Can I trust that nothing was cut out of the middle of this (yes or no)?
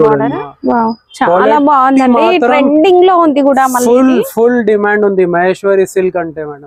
yes